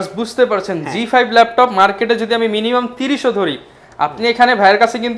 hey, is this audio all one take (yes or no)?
yes